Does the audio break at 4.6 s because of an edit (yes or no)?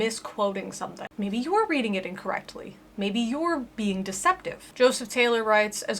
yes